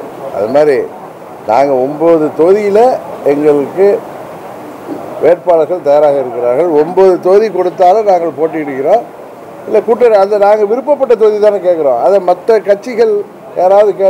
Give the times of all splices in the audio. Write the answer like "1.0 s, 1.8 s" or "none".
none